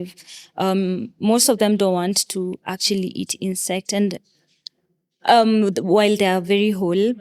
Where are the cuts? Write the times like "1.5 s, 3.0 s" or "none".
none